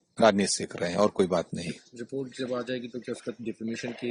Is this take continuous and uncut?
yes; 0 cuts

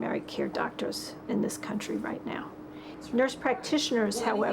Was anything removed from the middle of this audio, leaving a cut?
yes; 1 cut; at 2.9 s

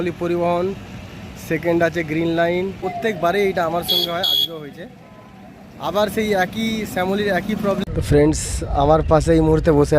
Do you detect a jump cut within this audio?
yes; 2 cuts; at 2.8 s, 7.8 s

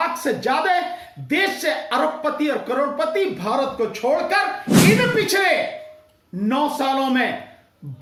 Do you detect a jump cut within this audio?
no; 0 cuts

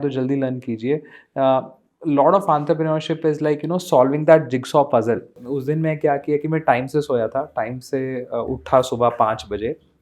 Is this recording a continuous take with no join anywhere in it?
no; 1 cut; at 5.4 s

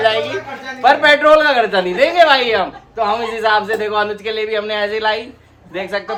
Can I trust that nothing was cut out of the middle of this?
yes; 0 cuts

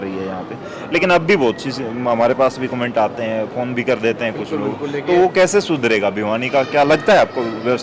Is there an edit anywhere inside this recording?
no; 0 cuts

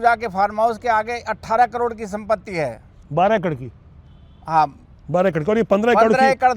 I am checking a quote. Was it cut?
no; 0 cuts

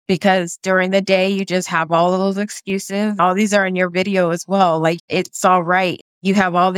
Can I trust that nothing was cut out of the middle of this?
no; 3 cuts; at 3.2 s, 5.0 s, 6.0 s

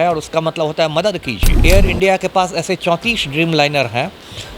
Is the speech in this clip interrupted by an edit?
yes; 1 cut; at 1.5 s

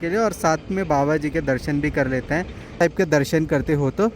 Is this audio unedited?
no; 1 cut; at 2.8 s

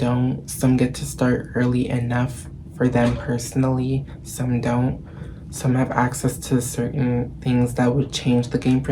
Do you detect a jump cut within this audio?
no; 0 cuts

